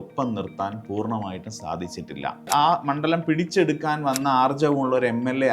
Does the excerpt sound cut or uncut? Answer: cut